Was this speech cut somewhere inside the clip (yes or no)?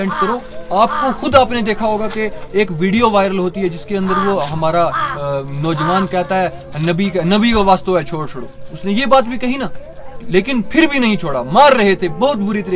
no